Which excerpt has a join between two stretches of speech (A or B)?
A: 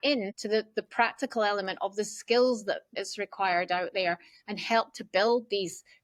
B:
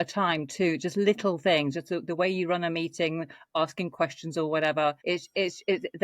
B